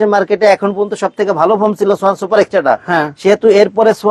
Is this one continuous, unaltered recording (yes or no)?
yes